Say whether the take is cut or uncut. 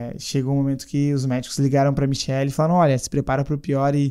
uncut